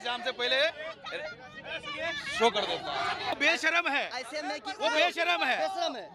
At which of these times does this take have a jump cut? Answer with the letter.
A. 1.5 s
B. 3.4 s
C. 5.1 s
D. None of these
B